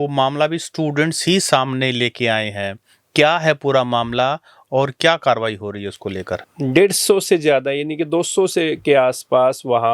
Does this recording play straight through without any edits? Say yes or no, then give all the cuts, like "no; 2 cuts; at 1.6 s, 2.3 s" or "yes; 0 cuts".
no; 1 cut; at 6.4 s